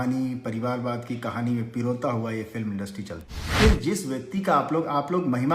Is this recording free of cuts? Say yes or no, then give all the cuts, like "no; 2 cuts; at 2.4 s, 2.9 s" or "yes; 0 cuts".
no; 1 cut; at 3.5 s